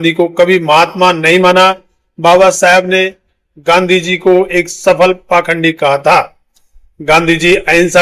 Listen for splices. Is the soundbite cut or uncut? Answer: uncut